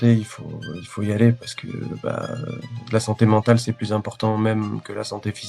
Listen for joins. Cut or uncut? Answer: uncut